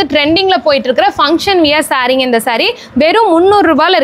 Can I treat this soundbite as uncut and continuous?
yes; 0 cuts

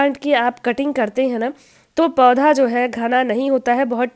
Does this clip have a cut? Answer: no; 0 cuts

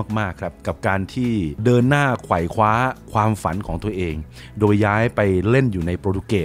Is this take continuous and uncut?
yes; 0 cuts

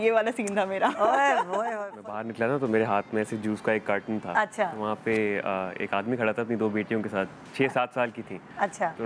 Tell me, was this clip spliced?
yes; 1 cut; at 1.8 s

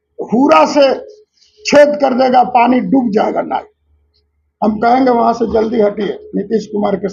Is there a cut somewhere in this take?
no; 0 cuts

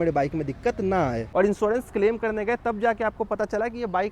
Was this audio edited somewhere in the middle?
yes; 1 cut; at 1.3 s

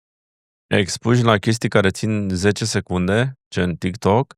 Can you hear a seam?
no; 0 cuts

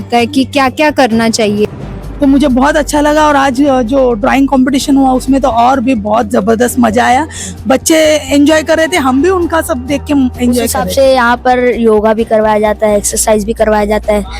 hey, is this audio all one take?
no; 2 cuts; at 1.7 s, 10.8 s

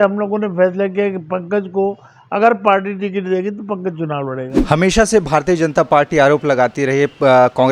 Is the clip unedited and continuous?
no; 1 cut; at 4.5 s

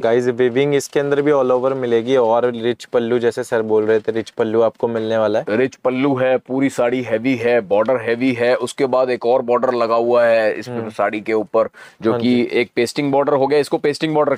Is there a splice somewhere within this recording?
no; 0 cuts

